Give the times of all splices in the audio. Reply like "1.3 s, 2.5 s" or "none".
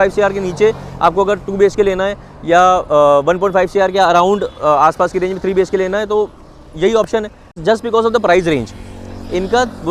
7.6 s